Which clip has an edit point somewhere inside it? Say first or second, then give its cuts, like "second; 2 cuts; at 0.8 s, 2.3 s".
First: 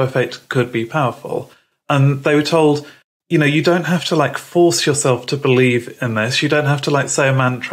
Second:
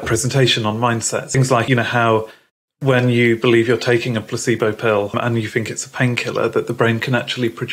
second; 2 cuts; at 1.4 s, 5.1 s